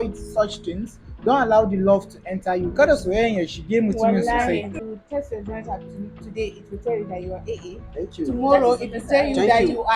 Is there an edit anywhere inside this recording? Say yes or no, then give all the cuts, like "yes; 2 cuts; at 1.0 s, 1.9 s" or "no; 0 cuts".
yes; 1 cut; at 4.7 s